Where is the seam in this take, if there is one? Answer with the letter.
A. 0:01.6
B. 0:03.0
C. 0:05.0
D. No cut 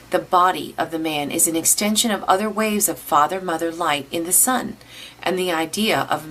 D